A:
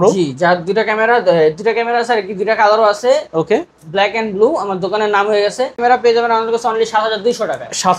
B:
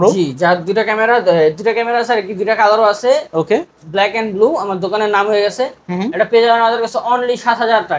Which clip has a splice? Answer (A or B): A